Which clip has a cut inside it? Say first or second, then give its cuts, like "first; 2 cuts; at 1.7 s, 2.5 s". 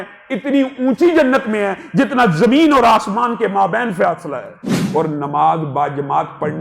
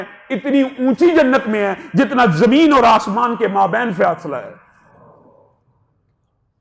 first; 1 cut; at 4.8 s